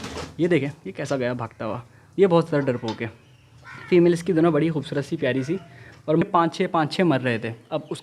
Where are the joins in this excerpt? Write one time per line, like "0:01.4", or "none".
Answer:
0:06.2